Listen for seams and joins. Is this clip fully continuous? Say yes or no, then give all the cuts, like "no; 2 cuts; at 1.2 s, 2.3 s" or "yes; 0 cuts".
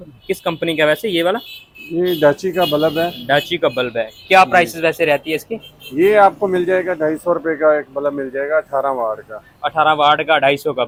yes; 0 cuts